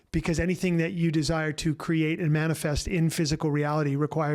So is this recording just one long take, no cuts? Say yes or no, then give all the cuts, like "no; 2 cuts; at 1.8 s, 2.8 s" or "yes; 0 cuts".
yes; 0 cuts